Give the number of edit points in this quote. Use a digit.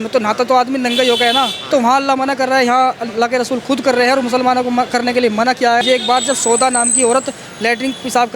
2